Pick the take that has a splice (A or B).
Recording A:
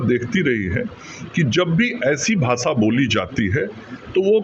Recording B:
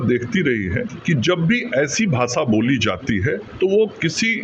B